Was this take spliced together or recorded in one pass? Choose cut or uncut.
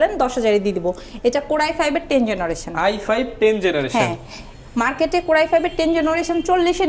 uncut